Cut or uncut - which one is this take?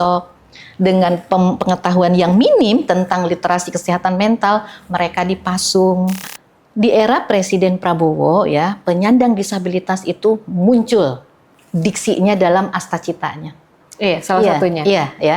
cut